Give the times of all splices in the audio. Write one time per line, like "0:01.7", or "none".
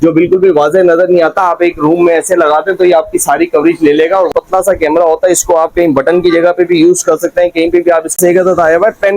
0:04.3
0:08.2